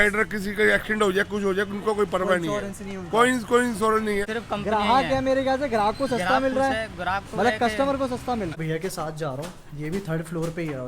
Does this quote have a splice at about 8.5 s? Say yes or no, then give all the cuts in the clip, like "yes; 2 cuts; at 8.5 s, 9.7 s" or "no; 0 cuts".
yes; 2 cuts; at 4.3 s, 8.5 s